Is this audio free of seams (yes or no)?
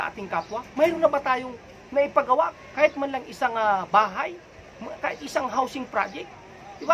no